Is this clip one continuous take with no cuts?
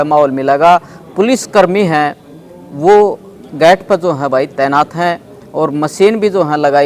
yes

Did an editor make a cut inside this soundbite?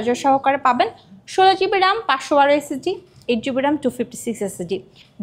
no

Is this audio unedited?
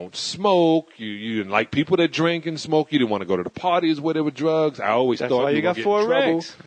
no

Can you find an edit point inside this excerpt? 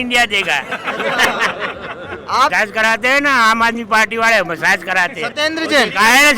yes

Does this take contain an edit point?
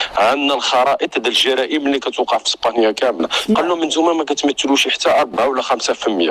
no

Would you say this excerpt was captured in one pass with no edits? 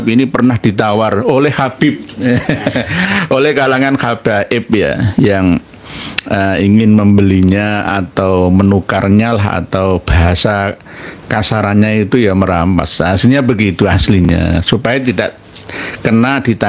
yes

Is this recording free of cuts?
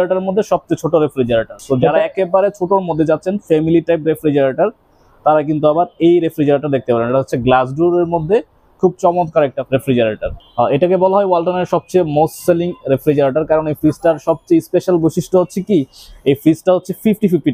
no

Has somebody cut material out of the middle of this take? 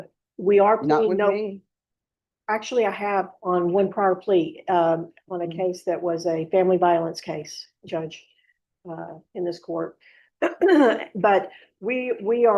no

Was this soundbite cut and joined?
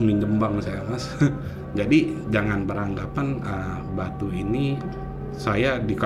no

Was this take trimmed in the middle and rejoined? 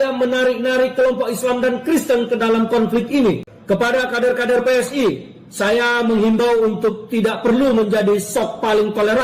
yes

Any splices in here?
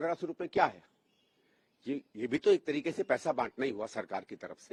no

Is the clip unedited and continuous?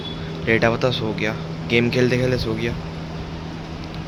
yes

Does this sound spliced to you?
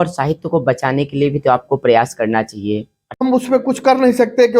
yes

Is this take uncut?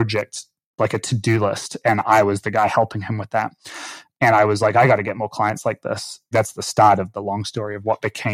no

